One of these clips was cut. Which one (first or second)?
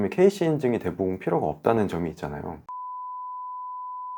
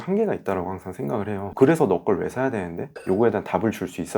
second